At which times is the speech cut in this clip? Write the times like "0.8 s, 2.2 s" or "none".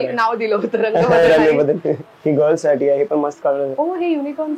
2.1 s